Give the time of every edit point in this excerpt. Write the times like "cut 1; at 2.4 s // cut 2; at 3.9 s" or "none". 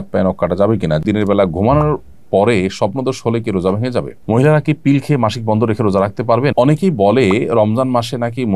cut 1; at 1.0 s // cut 2; at 4.2 s // cut 3; at 6.5 s